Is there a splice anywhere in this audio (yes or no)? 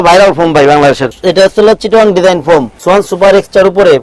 yes